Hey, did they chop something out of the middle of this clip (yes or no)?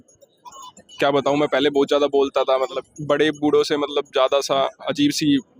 yes